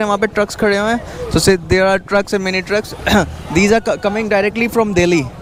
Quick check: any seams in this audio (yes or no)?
no